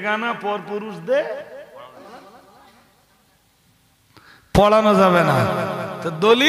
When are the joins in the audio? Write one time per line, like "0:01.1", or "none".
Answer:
0:02.1